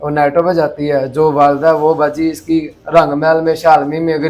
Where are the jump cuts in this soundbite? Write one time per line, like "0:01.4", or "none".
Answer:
none